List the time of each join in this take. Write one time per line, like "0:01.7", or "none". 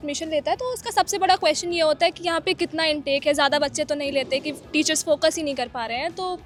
none

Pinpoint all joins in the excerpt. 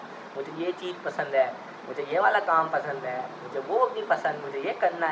none

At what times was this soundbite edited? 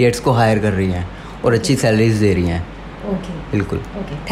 none

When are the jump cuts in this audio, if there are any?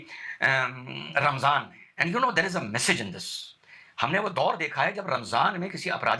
none

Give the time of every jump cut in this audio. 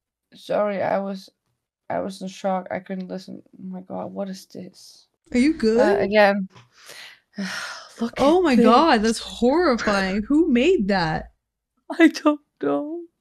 none

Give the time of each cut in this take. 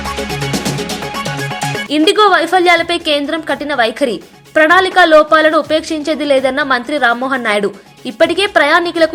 none

